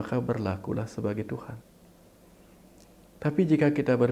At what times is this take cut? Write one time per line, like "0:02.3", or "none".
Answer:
none